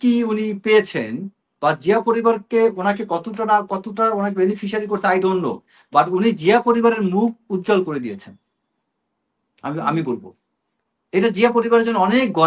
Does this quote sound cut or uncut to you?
uncut